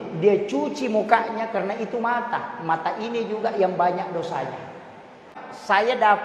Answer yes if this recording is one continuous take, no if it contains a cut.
no